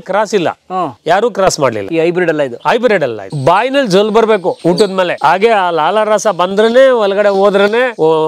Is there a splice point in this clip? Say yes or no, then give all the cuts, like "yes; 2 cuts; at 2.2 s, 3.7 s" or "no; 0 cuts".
yes; 1 cut; at 3.3 s